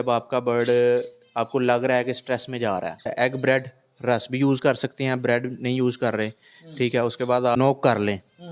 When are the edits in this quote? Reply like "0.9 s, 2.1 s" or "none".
3.1 s, 7.6 s